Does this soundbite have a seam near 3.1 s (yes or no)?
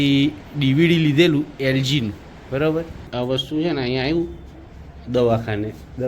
yes